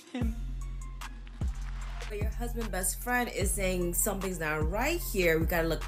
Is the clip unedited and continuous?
yes; 0 cuts

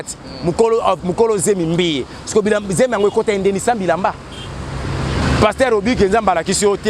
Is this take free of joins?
no; 1 cut; at 5.2 s

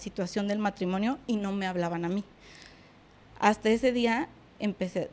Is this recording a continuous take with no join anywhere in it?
yes; 0 cuts

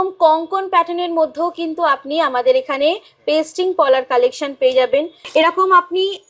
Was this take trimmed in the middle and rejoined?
yes; 1 cut; at 5.2 s

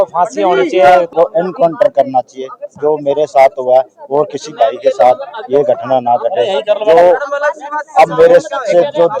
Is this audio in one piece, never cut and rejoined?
no; 1 cut; at 1.1 s

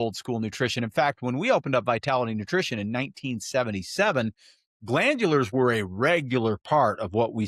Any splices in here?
no; 0 cuts

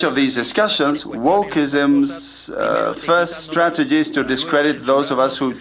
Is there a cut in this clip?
no; 0 cuts

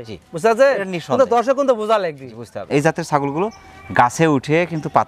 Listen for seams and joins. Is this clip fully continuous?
no; 1 cut; at 2.7 s

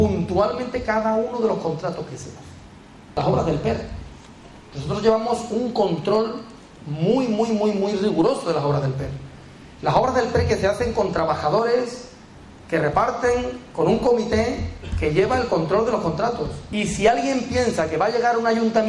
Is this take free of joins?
no; 2 cuts; at 3.1 s, 16.6 s

